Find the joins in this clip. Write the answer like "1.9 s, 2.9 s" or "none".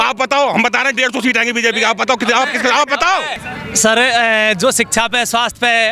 3.4 s